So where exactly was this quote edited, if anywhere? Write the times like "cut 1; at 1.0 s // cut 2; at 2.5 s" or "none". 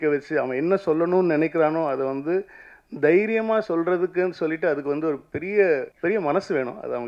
cut 1; at 5.9 s